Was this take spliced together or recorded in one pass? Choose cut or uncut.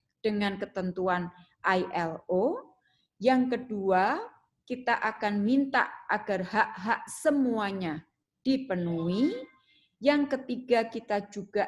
uncut